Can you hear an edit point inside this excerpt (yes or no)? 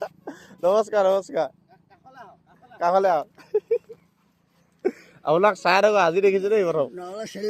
no